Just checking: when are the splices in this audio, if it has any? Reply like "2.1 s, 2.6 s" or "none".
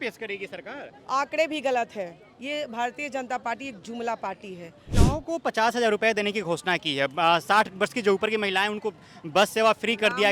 4.9 s

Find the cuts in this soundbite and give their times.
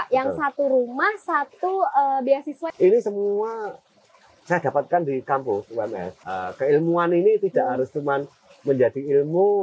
2.5 s, 6.1 s

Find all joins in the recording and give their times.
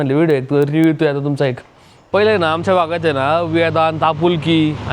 1.9 s

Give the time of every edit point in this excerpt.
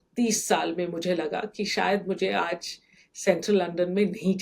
none

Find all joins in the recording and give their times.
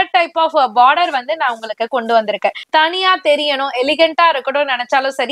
2.6 s

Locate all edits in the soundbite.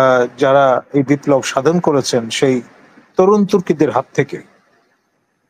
none

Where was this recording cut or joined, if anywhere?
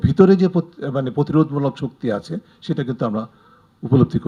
none

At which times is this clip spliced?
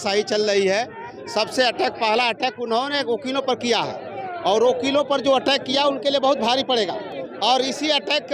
none

